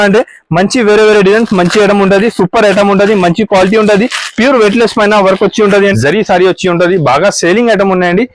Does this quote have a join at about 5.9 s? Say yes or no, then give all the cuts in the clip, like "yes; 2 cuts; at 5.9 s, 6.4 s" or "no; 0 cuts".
yes; 1 cut; at 5.9 s